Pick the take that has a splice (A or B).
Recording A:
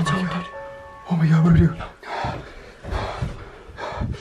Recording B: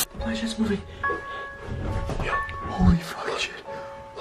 A